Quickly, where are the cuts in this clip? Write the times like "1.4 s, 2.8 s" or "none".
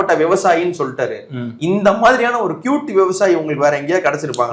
none